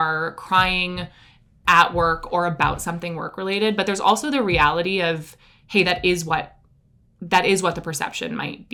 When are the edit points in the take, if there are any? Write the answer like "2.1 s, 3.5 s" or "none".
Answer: none